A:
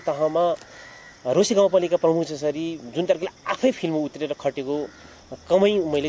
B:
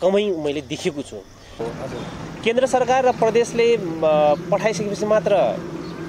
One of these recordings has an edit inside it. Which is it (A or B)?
B